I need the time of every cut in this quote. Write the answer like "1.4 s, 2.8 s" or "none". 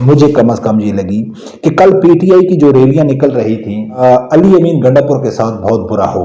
4.0 s